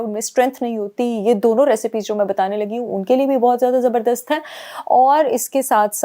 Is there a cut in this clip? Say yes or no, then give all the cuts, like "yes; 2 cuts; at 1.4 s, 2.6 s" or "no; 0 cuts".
no; 0 cuts